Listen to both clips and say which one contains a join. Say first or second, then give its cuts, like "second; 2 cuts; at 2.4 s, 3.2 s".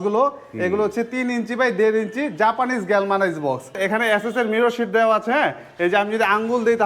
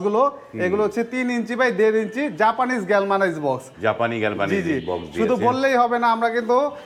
first; 1 cut; at 3.8 s